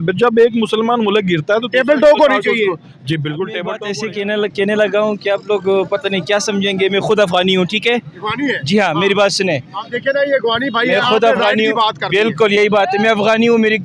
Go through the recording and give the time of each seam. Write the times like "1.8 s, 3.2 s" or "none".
3.8 s